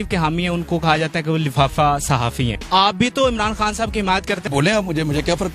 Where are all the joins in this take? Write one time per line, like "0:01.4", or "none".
0:02.5
0:04.4